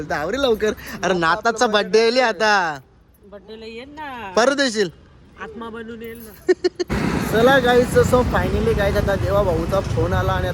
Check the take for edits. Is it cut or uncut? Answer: cut